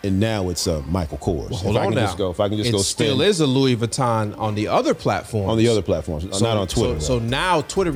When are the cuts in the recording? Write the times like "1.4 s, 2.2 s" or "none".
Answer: none